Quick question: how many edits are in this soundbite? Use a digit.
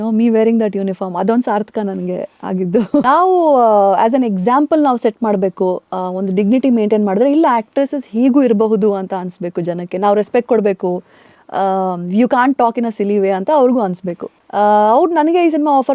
2